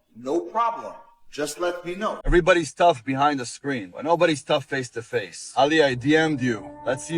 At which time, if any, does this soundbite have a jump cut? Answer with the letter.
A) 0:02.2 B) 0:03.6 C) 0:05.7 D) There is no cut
A